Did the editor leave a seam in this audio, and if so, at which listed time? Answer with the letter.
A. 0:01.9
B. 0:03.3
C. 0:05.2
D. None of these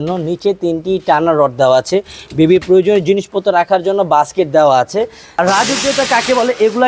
C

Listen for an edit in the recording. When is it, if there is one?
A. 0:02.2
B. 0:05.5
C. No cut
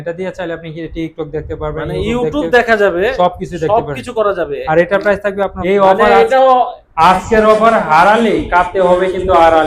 B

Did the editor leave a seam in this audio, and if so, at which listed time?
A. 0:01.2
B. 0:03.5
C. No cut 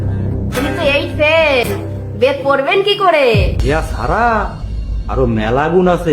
B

